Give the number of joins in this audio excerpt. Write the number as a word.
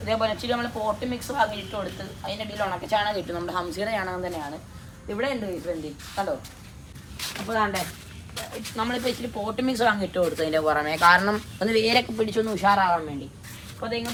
zero